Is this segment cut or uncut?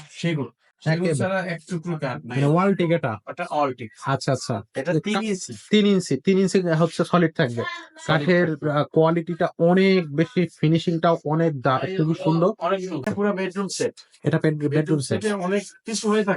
cut